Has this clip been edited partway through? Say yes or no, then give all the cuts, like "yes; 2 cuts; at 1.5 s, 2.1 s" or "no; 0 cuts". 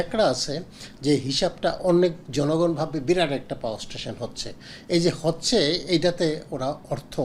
no; 0 cuts